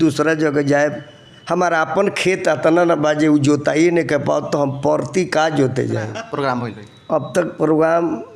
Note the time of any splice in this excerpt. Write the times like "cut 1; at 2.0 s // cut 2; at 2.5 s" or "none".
cut 1; at 6.1 s